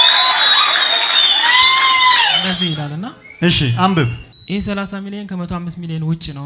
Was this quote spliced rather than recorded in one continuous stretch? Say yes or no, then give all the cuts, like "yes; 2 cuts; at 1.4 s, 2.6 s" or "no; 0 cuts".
yes; 2 cuts; at 2.4 s, 4.3 s